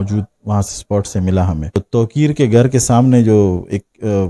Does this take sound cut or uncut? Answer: cut